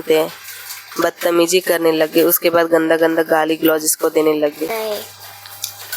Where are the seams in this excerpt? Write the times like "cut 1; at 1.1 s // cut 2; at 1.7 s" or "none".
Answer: cut 1; at 4.7 s